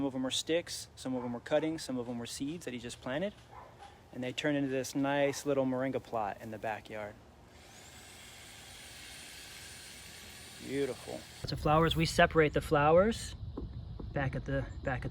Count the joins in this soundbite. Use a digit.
1